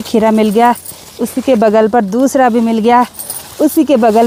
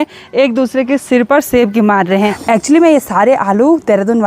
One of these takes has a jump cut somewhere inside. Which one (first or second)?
second